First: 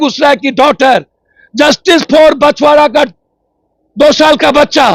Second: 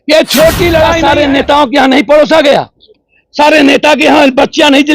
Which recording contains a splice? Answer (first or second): second